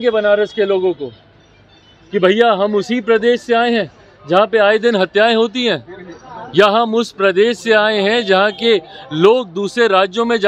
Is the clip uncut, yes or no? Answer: yes